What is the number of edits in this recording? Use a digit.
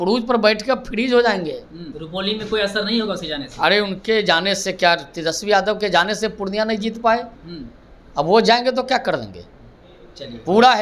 1